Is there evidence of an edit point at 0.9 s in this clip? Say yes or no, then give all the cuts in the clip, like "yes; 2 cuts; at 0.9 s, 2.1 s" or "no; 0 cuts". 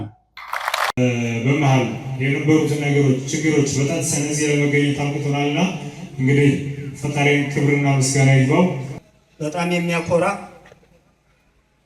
yes; 2 cuts; at 0.9 s, 8.9 s